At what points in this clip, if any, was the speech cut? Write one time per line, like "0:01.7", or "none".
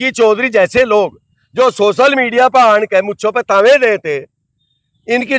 none